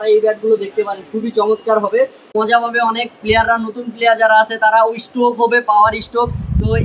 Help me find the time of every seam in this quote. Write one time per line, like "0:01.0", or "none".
0:02.3